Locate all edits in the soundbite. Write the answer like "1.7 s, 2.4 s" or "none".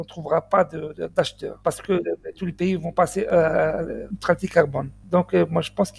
1.4 s, 4.1 s